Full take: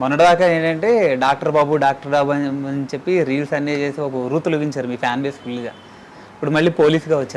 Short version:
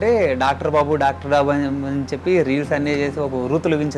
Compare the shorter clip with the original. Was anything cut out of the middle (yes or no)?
no